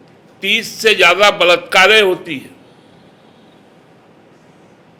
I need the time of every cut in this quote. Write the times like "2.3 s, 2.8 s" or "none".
none